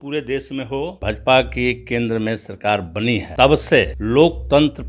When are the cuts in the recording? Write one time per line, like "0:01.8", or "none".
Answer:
0:01.0
0:03.3
0:04.0

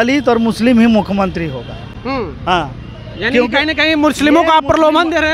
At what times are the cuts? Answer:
none

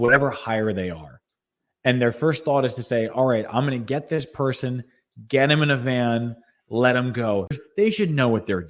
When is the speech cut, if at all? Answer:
0:07.5

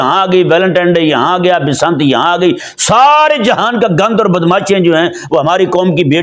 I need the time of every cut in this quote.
none

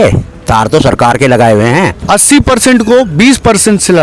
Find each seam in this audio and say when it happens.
0:02.0

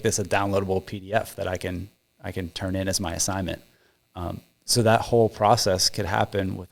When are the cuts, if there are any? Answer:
none

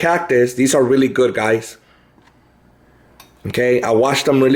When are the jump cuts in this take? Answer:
none

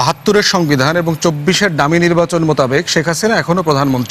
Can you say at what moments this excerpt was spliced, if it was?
none

